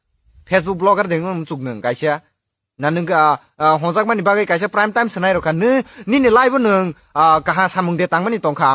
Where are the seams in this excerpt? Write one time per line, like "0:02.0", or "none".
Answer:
none